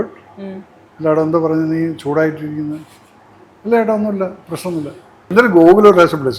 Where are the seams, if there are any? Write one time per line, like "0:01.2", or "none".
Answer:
0:05.2